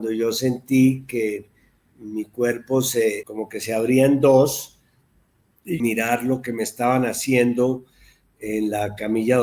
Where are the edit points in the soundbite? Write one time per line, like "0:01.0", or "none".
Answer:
0:03.3
0:05.8